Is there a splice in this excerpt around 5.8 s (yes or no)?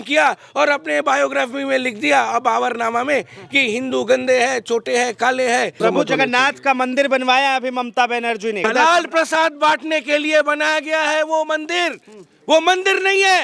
yes